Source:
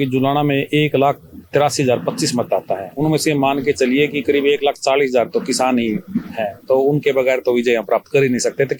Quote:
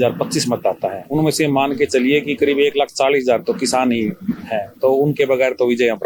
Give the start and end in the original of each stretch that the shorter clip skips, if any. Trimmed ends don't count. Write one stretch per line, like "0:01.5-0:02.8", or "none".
none